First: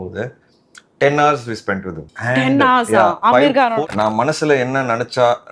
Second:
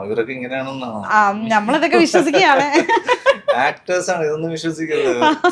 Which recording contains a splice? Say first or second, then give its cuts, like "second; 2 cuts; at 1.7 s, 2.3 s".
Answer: first; 2 cuts; at 2.0 s, 3.8 s